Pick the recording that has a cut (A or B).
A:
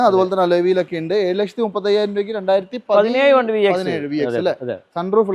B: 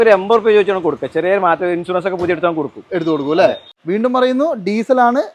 B